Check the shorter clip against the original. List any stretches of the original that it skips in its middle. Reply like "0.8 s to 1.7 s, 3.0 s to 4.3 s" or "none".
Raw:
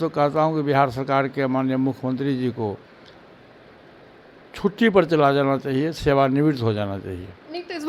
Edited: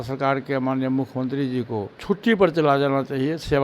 2.8 s to 4.5 s